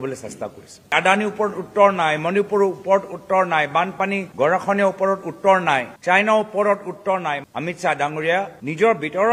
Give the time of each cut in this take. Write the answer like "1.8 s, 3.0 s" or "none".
7.4 s